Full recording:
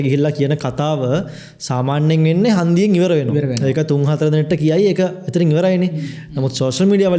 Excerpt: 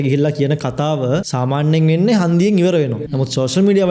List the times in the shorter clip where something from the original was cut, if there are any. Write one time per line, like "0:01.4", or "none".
0:01.3
0:03.0